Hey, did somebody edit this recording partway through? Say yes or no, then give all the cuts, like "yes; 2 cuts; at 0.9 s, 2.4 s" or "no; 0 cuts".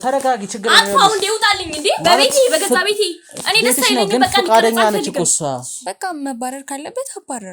yes; 1 cut; at 5.8 s